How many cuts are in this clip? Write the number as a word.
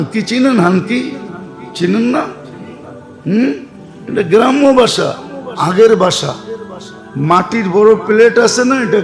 zero